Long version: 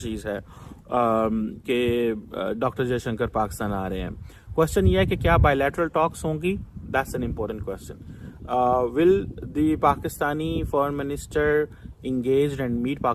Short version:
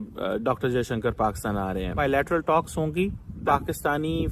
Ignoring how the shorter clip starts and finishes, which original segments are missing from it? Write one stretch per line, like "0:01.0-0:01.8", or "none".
0:04.1-0:05.5
0:06.9-0:09.8